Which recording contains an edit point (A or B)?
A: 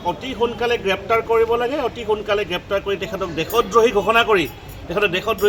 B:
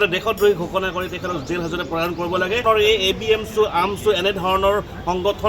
B